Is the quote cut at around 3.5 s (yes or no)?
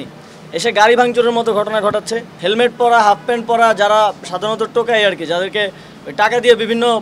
no